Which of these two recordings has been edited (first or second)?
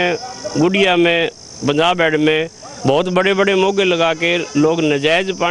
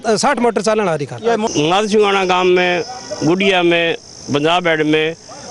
second